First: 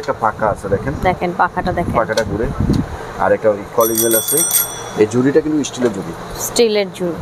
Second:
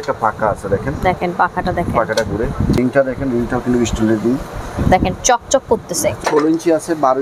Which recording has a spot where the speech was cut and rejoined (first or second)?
second